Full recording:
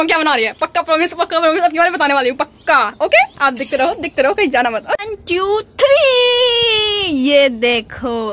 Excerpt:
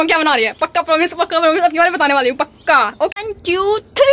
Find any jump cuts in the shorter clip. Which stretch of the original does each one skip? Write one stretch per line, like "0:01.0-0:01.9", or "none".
0:03.1-0:04.9